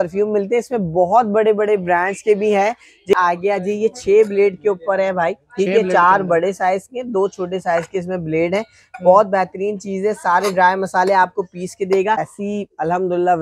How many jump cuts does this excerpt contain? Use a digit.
2